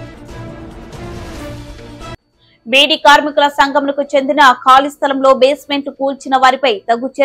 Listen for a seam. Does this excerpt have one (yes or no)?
no